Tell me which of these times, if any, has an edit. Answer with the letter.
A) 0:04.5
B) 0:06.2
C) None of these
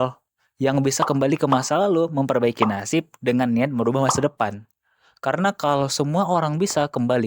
C